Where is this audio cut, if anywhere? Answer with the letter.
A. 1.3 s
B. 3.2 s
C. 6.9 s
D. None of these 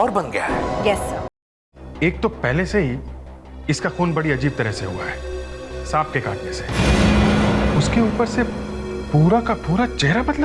A